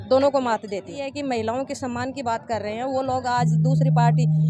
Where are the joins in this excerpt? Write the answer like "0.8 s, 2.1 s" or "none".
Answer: 1.0 s